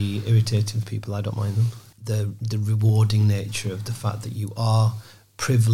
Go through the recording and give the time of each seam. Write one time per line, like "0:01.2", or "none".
0:01.9